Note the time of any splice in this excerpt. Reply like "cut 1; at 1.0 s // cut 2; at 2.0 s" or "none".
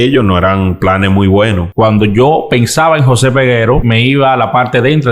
cut 1; at 1.7 s // cut 2; at 3.8 s